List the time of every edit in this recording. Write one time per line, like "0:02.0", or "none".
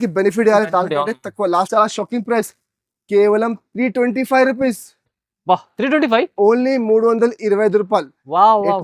0:01.7